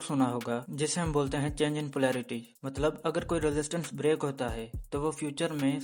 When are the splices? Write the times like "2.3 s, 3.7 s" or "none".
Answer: none